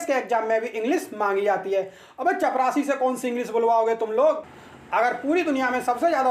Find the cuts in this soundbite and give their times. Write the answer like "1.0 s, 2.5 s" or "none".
none